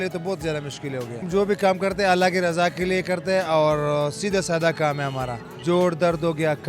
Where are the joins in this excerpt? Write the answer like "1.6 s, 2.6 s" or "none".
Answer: 1.2 s, 5.5 s